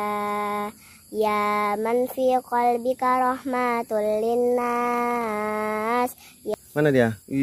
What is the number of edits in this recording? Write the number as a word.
one